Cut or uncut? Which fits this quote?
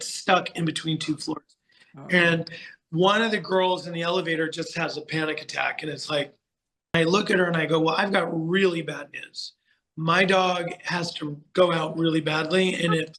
cut